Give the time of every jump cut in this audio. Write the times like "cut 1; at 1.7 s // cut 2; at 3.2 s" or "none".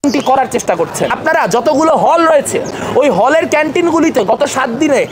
cut 1; at 1.2 s